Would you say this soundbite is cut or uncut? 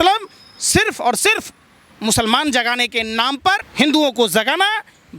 cut